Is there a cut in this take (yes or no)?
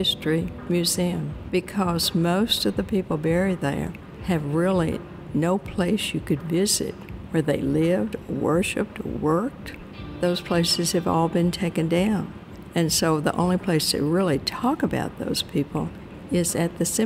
no